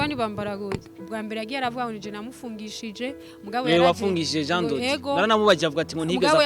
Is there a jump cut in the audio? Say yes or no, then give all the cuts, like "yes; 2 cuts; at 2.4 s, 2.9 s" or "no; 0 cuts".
yes; 1 cut; at 0.9 s